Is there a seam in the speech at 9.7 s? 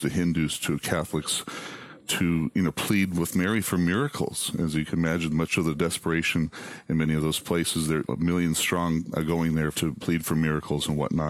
yes; 1 cut; at 9.7 s

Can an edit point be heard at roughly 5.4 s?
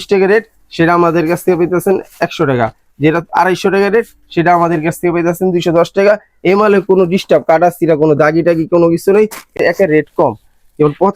no; 1 cut; at 9.5 s

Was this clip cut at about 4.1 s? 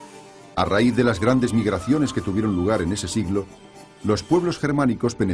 yes; 1 cut; at 4.1 s

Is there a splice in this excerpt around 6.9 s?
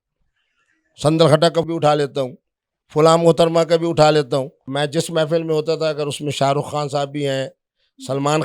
no; 2 cuts; at 1.7 s, 4.6 s

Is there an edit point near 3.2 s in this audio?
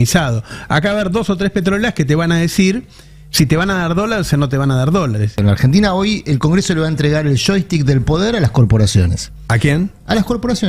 no; 1 cut; at 5.4 s

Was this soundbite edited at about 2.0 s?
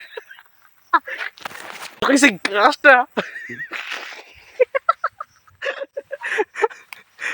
yes; 1 cut; at 2.0 s

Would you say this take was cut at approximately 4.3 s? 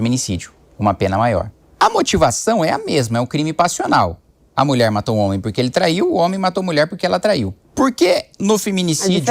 no; 2 cuts; at 1.6 s, 7.6 s

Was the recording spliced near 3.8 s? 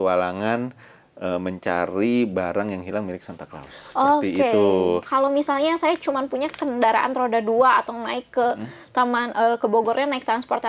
no; 1 cut; at 5.1 s

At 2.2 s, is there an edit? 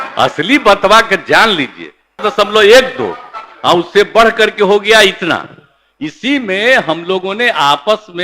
yes; 1 cut; at 2.2 s

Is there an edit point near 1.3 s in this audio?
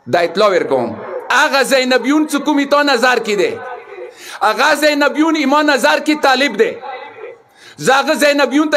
yes; 1 cut; at 1.3 s

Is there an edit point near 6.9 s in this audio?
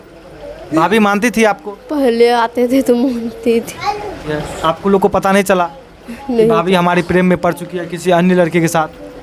no; 1 cut; at 4.3 s

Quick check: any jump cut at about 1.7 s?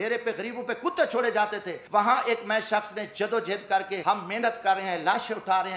yes; 2 cuts; at 1.7 s, 4.0 s

